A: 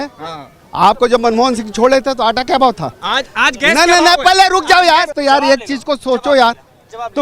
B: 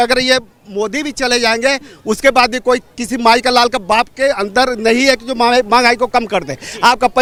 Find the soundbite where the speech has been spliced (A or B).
A